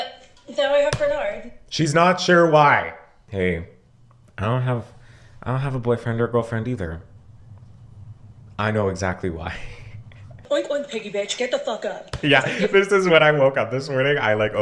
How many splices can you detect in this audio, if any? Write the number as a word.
one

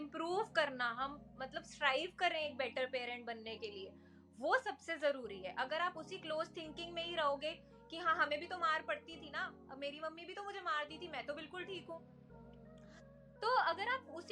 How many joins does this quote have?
zero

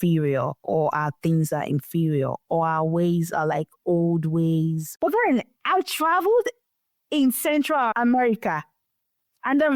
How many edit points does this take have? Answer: one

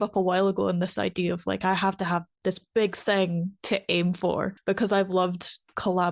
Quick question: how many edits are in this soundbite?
one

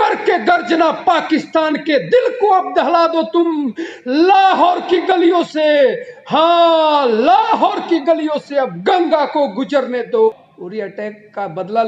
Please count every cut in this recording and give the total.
one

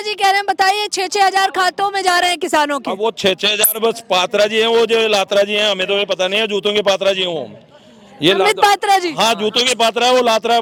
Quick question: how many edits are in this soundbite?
zero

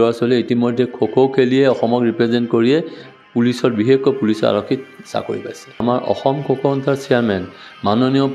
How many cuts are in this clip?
one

